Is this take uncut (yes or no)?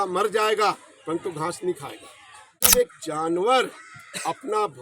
no